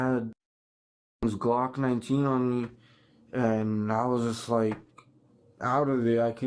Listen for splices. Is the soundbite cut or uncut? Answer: uncut